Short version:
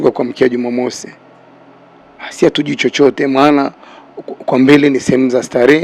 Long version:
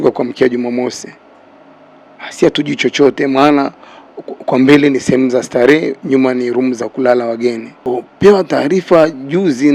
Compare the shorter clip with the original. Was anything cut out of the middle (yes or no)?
no